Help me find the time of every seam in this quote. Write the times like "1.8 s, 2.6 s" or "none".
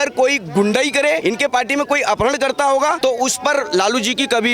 1.2 s, 3.0 s